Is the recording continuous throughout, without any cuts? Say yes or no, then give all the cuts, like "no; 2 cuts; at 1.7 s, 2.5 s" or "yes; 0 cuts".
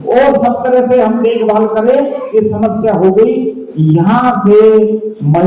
yes; 0 cuts